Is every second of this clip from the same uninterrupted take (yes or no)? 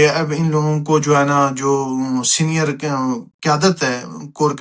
yes